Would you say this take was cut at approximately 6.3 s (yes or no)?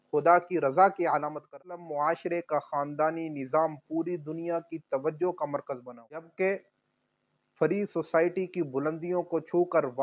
yes